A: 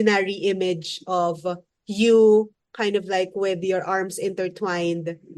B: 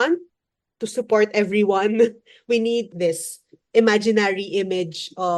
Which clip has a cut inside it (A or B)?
B